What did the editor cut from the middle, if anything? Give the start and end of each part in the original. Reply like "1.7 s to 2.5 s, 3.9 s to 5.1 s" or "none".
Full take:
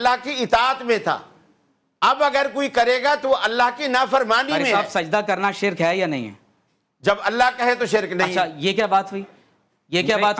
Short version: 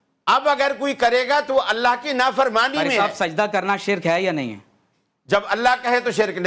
none